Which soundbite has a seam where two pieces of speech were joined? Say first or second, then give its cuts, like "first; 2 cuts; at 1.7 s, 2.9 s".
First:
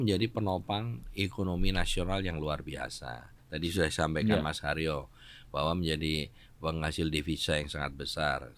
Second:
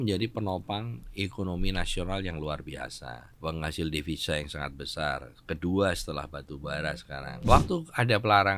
second; 2 cuts; at 3.2 s, 7.5 s